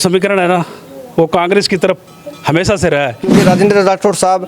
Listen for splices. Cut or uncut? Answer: cut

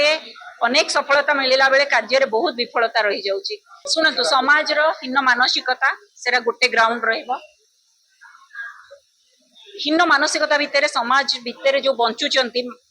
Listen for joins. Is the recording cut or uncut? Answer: cut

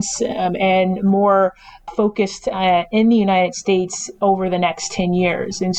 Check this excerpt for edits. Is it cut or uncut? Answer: cut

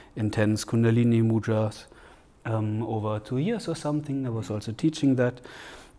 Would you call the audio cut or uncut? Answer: uncut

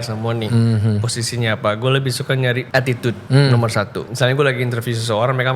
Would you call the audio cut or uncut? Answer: cut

